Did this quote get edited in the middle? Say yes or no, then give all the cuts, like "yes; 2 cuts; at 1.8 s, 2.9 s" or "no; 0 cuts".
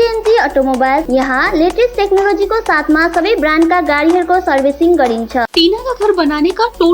yes; 2 cuts; at 1.0 s, 5.5 s